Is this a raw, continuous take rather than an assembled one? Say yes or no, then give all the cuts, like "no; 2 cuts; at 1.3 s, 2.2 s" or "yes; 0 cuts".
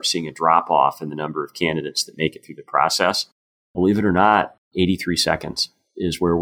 no; 1 cut; at 4.6 s